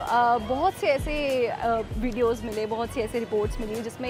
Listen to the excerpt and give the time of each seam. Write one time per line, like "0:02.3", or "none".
none